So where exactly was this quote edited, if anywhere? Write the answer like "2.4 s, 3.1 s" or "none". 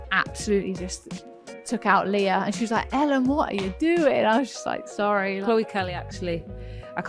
5.4 s